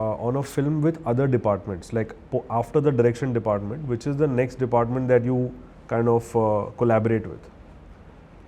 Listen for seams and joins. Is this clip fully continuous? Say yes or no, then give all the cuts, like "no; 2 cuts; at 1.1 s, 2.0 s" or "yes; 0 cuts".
yes; 0 cuts